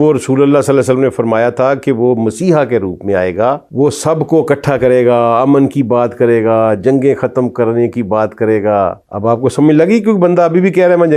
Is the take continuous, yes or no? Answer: yes